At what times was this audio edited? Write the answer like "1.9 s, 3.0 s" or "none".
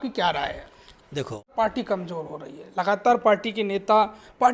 1.5 s

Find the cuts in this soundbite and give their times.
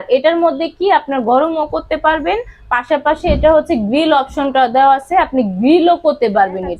none

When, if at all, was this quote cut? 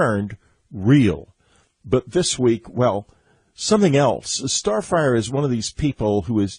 none

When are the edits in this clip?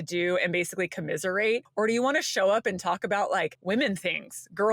1.7 s, 3.6 s

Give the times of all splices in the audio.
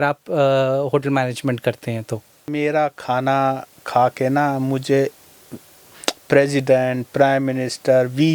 2.5 s

